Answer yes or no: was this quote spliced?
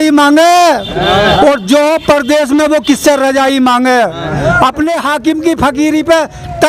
no